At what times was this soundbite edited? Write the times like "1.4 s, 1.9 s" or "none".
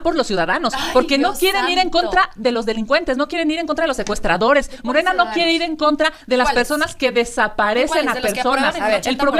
none